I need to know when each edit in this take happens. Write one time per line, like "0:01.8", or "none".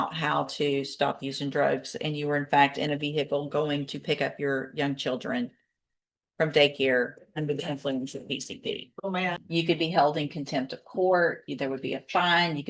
0:09.4